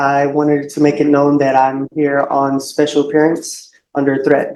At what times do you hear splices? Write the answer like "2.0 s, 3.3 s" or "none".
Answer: none